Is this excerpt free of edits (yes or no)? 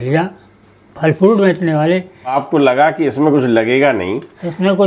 no